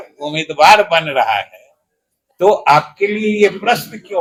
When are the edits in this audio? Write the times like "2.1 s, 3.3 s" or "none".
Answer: none